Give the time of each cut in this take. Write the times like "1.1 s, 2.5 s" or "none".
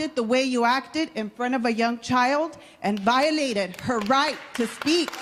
none